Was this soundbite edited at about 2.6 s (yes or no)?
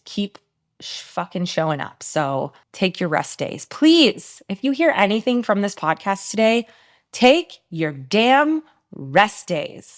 no